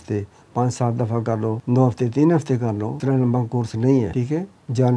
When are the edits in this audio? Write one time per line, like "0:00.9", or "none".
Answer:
0:01.6
0:02.9
0:04.1